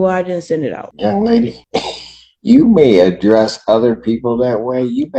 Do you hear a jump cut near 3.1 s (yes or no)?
no